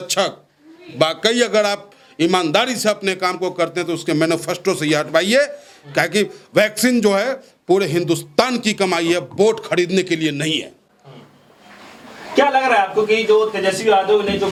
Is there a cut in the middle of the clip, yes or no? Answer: no